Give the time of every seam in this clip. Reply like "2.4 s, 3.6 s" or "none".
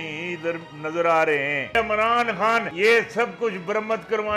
1.8 s, 2.7 s